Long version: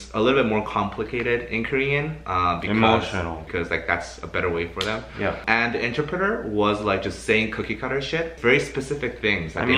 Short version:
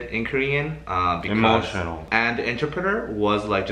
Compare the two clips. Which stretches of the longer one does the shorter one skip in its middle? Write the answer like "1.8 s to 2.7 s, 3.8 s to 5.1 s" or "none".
3.4 s to 5.4 s